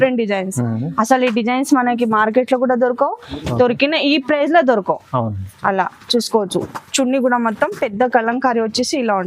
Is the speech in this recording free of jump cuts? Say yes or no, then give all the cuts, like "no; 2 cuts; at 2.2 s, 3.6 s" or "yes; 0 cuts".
yes; 0 cuts